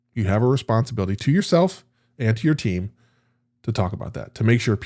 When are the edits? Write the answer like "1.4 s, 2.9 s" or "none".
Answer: none